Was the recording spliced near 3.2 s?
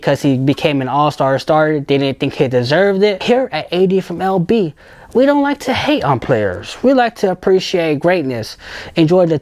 yes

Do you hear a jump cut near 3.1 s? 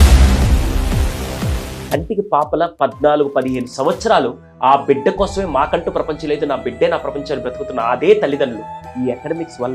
no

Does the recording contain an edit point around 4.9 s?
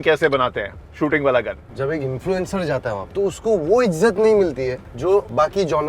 yes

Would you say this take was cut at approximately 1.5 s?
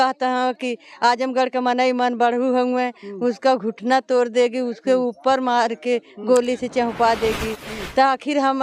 no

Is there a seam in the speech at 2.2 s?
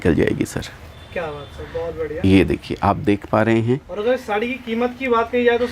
no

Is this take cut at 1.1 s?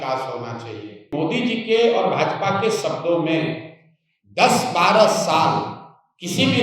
yes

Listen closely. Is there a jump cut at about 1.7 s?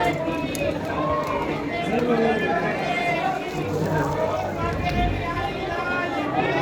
no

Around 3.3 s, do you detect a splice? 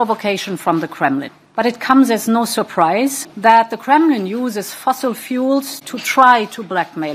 yes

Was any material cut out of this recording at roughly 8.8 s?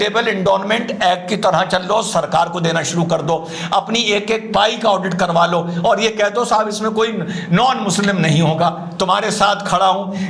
no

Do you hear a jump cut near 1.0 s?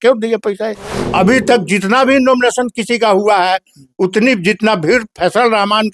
yes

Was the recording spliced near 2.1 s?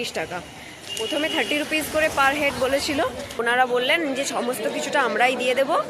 no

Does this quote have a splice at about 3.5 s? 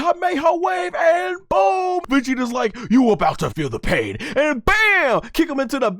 yes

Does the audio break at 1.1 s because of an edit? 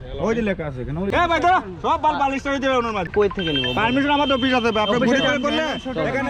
yes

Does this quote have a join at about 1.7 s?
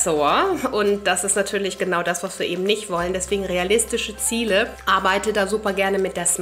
no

